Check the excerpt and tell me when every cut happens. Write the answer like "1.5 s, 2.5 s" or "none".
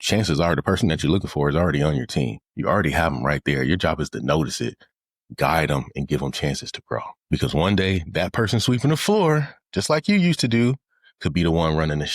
2.5 s, 7.2 s